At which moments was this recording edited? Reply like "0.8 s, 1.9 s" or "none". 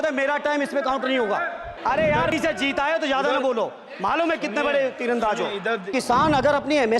1.7 s, 5.9 s